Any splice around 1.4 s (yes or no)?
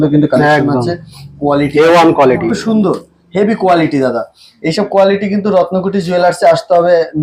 no